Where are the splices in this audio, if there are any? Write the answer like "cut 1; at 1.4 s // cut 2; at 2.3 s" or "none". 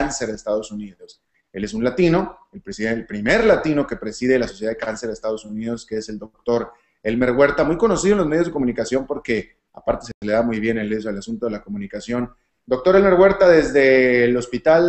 cut 1; at 12.6 s